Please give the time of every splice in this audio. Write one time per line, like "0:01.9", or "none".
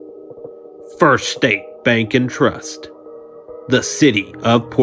none